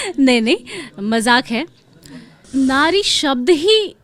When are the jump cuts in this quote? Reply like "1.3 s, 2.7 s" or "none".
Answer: 2.5 s